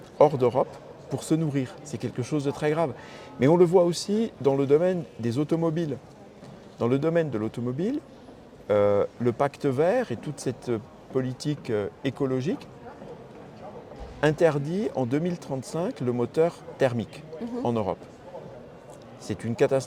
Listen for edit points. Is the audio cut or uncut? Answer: uncut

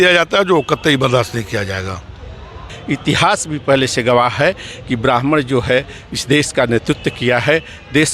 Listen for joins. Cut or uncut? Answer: cut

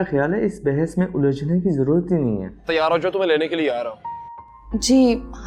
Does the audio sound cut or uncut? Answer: cut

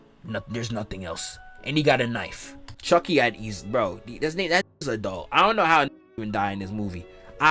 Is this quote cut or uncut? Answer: cut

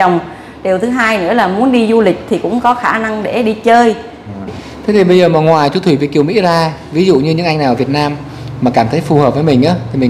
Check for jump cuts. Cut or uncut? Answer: cut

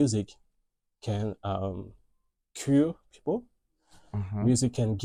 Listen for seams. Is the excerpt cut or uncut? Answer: uncut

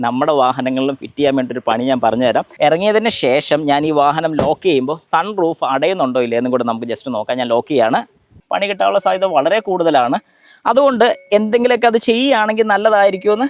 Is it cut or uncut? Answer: cut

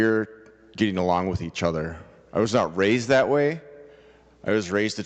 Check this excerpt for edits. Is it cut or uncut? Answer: uncut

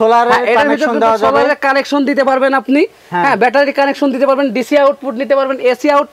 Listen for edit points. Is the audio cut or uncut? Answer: uncut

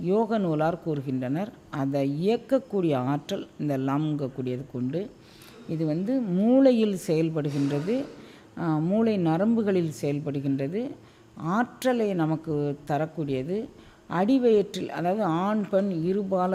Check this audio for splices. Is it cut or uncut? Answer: uncut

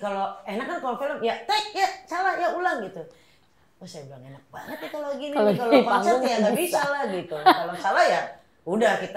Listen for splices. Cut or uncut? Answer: uncut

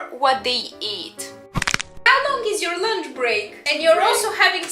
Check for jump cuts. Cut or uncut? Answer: cut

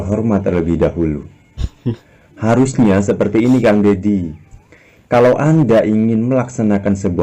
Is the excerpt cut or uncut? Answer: uncut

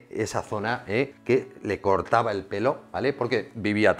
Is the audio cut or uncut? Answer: cut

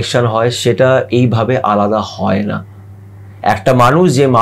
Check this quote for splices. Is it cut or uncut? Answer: uncut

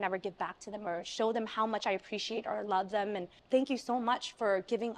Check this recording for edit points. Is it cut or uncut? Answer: cut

